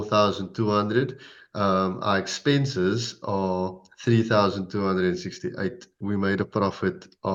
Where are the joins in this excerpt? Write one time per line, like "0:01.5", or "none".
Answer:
none